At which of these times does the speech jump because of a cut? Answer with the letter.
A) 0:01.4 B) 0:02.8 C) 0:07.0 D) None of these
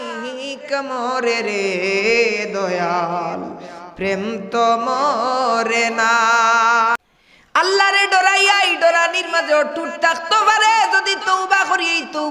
C